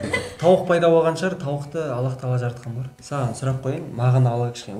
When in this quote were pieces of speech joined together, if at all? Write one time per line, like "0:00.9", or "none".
0:02.9

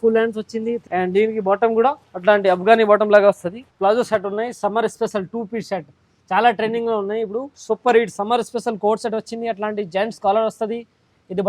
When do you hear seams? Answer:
0:00.8
0:02.1
0:03.6
0:07.5

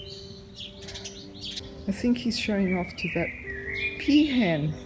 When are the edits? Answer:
0:01.6

